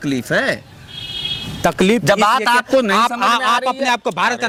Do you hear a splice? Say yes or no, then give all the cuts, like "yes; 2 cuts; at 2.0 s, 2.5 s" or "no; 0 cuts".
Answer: no; 0 cuts